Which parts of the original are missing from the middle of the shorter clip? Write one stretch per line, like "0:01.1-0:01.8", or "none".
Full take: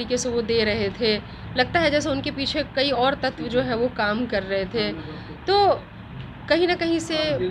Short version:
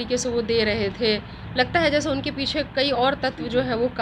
none